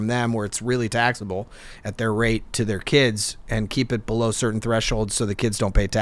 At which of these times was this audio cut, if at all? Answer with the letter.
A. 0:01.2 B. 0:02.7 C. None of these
C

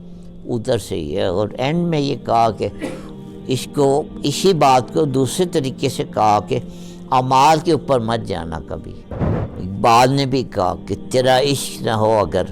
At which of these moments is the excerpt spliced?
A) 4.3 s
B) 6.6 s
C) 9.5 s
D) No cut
C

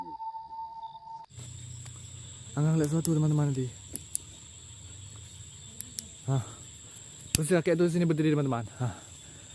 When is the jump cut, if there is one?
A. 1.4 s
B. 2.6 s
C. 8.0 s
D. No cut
A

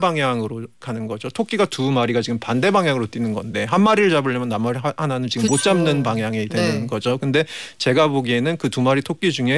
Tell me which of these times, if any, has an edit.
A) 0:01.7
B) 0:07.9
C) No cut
A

